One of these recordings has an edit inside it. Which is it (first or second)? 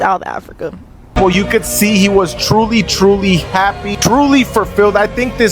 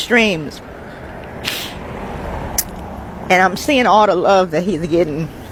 first